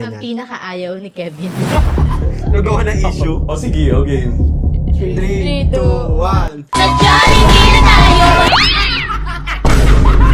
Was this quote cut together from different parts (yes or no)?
no